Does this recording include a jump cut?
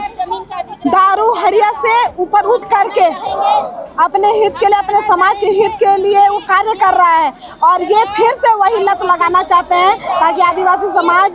no; 0 cuts

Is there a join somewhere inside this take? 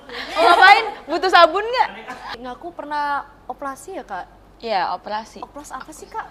yes; 1 cut; at 2.3 s

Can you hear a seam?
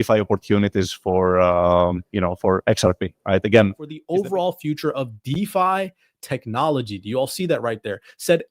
yes; 1 cut; at 3.9 s

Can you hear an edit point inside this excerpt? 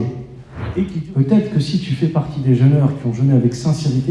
yes; 1 cut; at 0.9 s

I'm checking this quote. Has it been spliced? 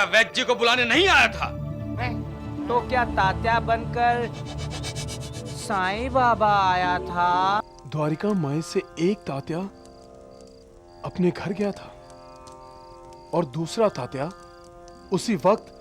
yes; 1 cut; at 7.6 s

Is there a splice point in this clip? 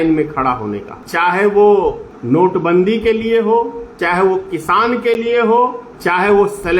yes; 4 cuts; at 0.9 s, 2.1 s, 3.8 s, 5.9 s

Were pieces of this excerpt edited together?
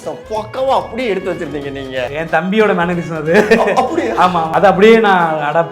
yes; 2 cuts; at 2.1 s, 4.5 s

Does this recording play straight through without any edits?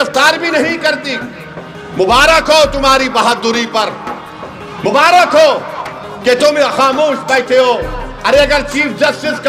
yes; 0 cuts

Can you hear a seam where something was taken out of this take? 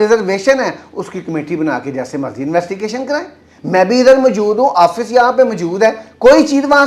no; 0 cuts

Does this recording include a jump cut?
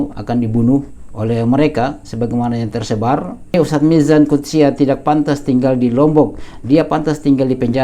yes; 1 cut; at 3.5 s

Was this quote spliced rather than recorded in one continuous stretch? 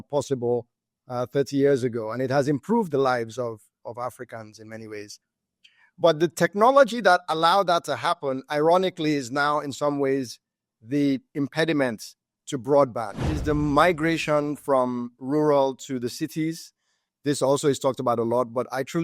yes; 1 cut; at 13.3 s

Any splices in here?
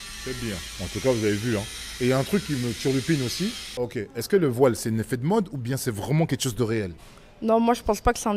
yes; 2 cuts; at 3.8 s, 7.1 s

